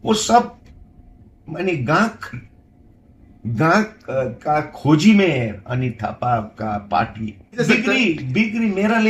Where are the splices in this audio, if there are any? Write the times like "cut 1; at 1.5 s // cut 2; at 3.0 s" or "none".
cut 1; at 7.6 s